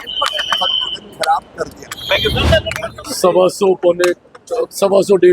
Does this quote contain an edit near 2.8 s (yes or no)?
yes